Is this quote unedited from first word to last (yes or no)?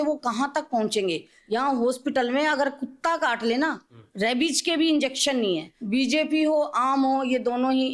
no